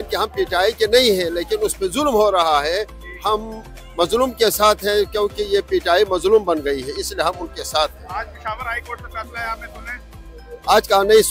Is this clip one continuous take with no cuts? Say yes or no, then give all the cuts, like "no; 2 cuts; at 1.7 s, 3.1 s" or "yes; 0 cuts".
yes; 0 cuts